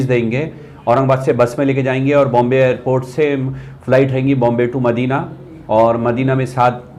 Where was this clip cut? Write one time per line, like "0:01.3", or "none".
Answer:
none